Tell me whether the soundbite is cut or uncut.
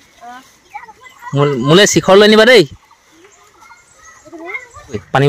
uncut